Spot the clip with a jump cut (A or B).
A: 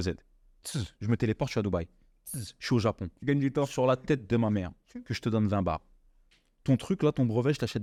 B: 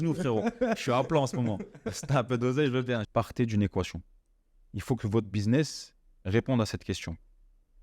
B